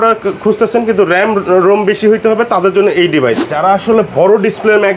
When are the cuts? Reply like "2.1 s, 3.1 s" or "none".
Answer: 3.5 s